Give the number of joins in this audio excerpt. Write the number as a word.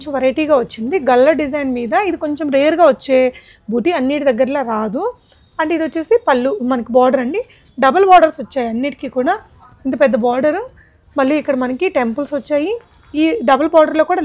zero